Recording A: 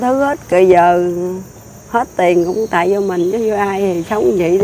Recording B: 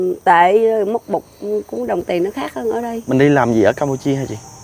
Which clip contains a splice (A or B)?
B